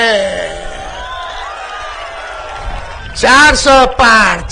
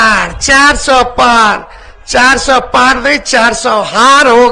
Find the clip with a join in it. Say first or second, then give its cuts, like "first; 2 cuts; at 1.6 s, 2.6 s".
first; 1 cut; at 3.0 s